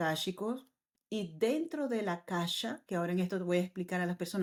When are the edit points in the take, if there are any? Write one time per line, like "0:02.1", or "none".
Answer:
none